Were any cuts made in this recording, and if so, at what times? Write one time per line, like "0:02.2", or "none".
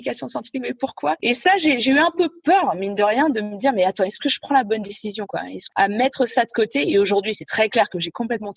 0:01.2
0:05.6